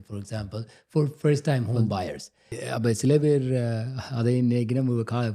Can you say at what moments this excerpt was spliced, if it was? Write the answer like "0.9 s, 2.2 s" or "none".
2.6 s